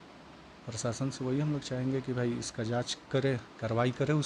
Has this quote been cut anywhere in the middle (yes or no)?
no